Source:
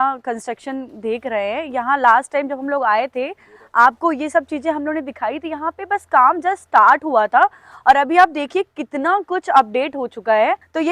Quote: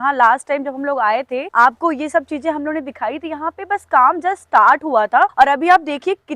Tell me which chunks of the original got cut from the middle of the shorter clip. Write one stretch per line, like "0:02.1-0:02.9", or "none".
0:03.3-0:03.6
0:07.5-0:07.8